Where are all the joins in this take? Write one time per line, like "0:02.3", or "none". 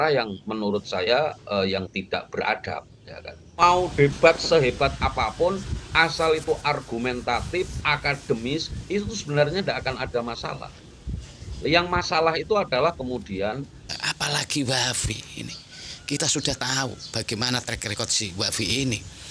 0:03.6
0:13.8